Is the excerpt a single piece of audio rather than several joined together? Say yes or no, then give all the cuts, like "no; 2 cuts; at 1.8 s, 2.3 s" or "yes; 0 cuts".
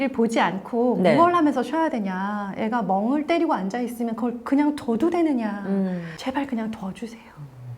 no; 1 cut; at 6.1 s